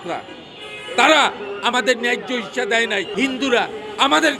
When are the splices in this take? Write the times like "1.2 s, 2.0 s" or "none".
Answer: 3.1 s